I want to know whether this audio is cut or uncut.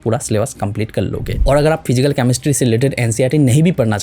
cut